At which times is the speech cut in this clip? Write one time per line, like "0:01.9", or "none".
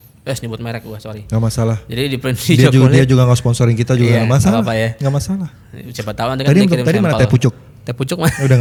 none